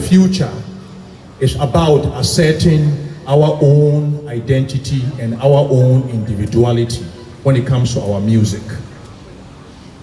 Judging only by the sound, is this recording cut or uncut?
uncut